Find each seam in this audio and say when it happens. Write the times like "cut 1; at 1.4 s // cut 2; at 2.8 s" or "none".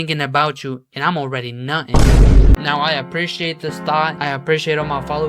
cut 1; at 2.5 s